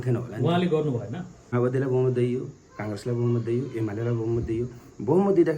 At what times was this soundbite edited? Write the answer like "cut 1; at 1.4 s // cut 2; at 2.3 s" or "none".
cut 1; at 1.5 s